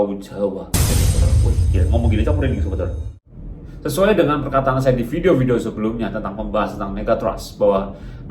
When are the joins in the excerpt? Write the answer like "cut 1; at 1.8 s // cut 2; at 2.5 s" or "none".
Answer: cut 1; at 3.2 s